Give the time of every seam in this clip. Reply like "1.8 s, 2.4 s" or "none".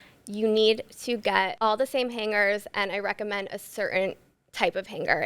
1.5 s